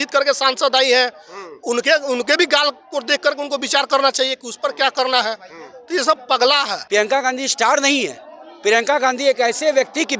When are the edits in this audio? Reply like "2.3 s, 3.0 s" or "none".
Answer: 6.8 s

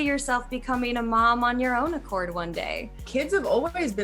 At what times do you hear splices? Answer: 3.0 s

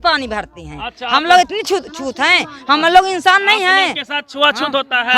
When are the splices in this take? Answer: none

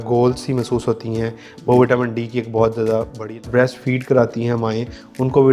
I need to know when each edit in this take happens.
3.4 s

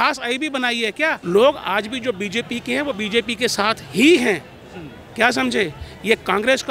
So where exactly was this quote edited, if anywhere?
1.2 s

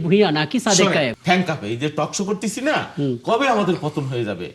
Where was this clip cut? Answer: 1.2 s

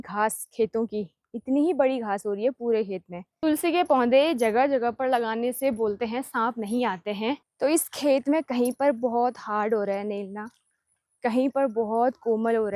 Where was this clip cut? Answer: 3.3 s, 7.5 s

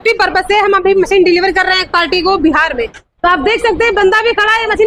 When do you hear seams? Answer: none

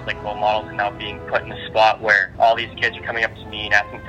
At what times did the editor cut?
2.3 s

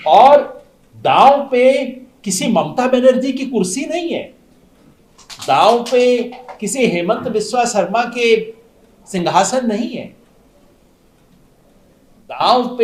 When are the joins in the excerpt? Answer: none

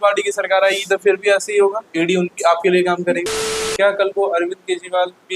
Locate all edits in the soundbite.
3.3 s

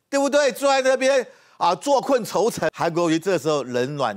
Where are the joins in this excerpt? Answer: 2.7 s

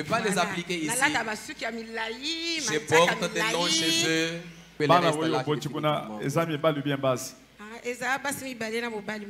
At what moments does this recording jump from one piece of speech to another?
4.7 s

